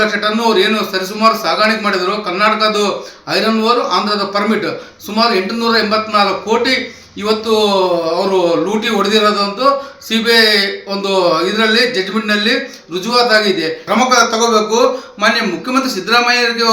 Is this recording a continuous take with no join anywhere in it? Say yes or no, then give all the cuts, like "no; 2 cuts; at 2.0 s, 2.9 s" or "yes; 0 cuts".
no; 1 cut; at 13.8 s